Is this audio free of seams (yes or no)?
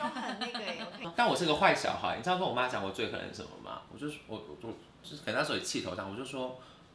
no